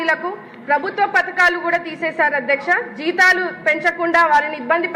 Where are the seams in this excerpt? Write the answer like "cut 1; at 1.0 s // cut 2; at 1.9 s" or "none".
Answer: none